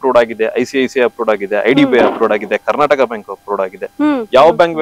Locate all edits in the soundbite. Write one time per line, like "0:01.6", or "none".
none